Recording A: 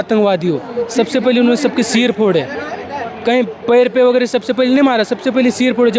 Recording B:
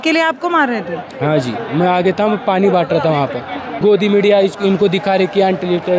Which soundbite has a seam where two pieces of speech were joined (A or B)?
B